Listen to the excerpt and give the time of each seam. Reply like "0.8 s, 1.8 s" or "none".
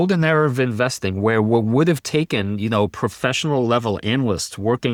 none